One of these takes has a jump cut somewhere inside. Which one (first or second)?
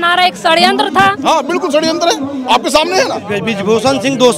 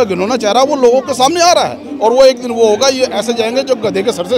first